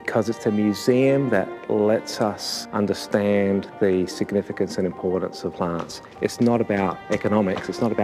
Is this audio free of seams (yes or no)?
yes